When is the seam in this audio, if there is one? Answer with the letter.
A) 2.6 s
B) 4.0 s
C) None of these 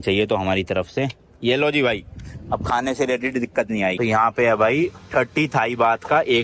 B